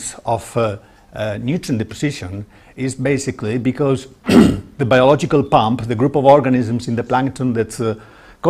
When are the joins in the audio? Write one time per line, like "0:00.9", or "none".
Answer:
none